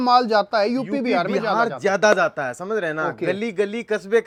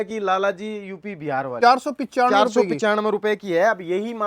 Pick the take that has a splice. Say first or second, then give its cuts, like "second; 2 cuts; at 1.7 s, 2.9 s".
second; 1 cut; at 1.5 s